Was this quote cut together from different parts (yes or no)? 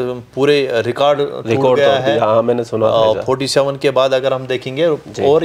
no